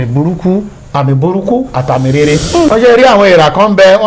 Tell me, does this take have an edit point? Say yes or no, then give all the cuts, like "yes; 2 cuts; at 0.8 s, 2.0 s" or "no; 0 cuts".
yes; 1 cut; at 2.7 s